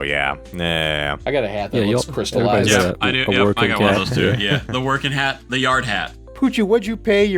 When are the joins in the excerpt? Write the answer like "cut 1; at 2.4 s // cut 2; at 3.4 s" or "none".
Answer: cut 1; at 6.2 s